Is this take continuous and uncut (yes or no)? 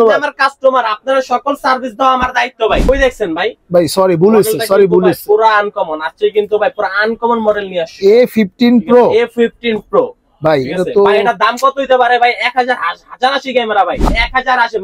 no